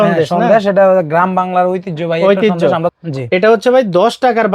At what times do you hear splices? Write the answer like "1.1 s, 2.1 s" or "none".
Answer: 2.9 s